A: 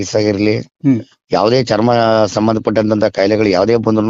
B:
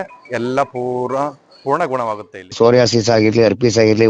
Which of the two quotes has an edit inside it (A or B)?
B